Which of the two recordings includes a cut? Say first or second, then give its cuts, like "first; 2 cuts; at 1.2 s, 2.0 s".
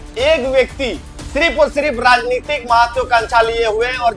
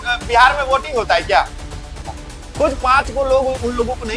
second; 1 cut; at 2.1 s